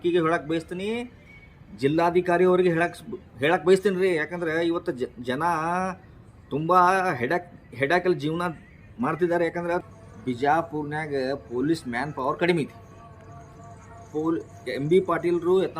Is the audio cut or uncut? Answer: cut